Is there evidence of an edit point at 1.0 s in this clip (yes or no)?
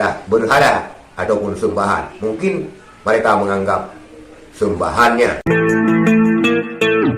no